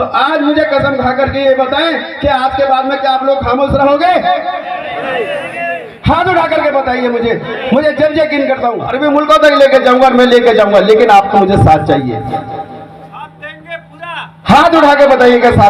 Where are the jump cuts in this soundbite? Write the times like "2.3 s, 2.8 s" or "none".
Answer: 9.0 s